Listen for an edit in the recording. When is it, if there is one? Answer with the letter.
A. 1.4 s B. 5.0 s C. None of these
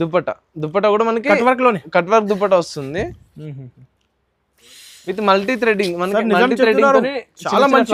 C